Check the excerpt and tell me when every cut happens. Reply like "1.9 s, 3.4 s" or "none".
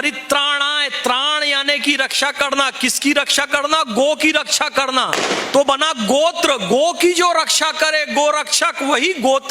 none